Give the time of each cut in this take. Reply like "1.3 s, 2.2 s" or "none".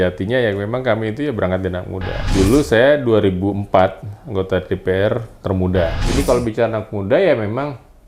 2.2 s, 6.0 s